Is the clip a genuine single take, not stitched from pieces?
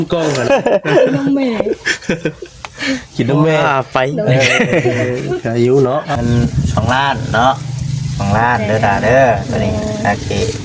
no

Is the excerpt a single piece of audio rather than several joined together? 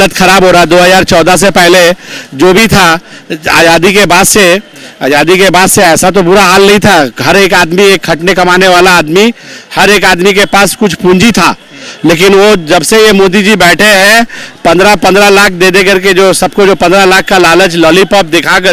yes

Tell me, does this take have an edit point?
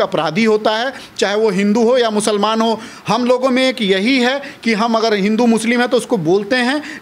no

